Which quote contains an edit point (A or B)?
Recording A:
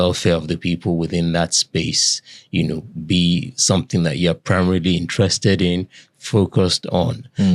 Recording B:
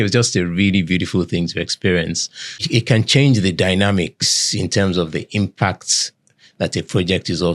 B